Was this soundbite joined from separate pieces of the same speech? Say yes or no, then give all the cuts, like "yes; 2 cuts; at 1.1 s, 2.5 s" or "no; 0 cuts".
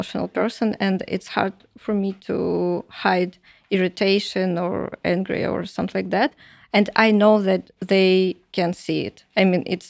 no; 0 cuts